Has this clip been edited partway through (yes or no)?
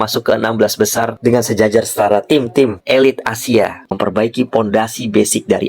yes